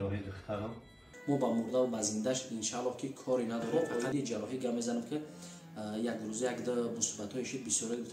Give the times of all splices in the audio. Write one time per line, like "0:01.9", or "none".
0:01.1
0:03.7

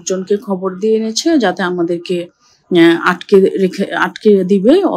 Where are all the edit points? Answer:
none

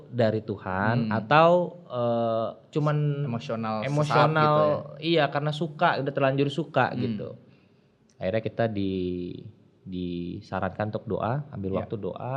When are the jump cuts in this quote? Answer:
none

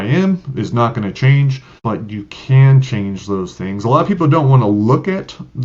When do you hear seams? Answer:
0:01.7

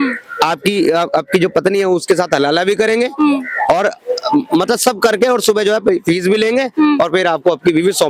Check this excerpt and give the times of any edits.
none

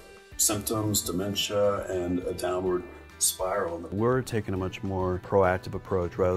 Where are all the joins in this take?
0:03.9
0:05.2

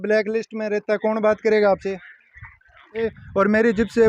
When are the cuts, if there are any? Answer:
0:03.0

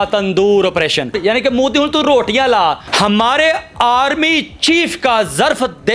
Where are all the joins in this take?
0:01.2
0:02.9

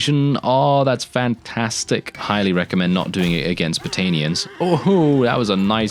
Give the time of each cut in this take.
0:02.1

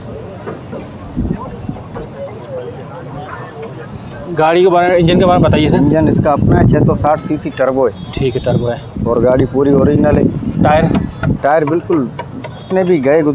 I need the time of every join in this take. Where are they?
none

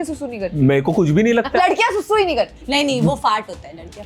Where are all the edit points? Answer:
0:01.5
0:02.6

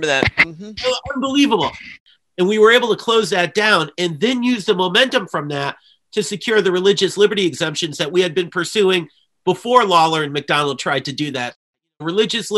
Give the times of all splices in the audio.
0:01.9
0:11.6

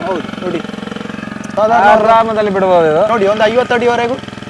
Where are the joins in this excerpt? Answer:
0:01.5
0:03.1

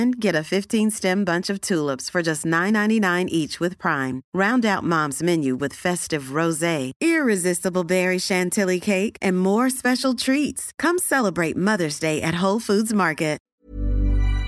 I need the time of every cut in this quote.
0:13.5

